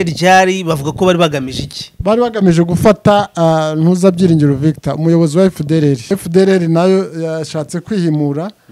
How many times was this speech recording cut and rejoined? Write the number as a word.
one